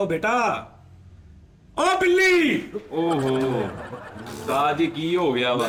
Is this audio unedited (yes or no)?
yes